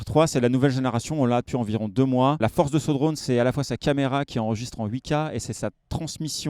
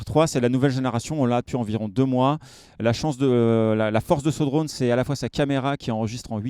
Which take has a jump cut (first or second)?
first